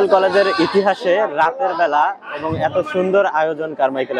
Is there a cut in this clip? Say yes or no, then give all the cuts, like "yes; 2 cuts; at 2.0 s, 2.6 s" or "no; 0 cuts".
no; 0 cuts